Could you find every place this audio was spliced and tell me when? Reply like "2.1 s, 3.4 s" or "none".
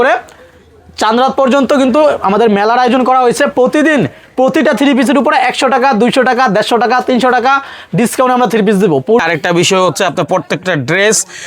9.2 s